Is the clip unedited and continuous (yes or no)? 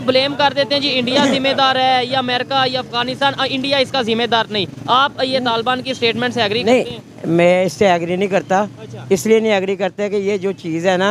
yes